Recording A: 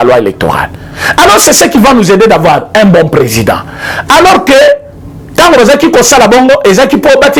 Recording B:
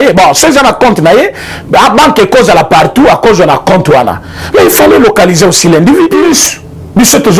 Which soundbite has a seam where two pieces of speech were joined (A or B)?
B